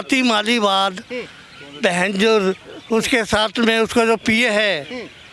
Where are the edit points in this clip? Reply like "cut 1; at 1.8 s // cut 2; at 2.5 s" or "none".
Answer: none